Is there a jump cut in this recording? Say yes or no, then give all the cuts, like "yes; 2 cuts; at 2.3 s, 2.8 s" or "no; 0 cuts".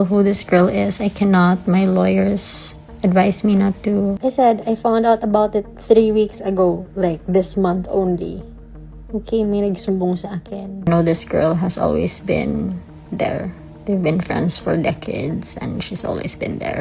yes; 2 cuts; at 4.2 s, 10.9 s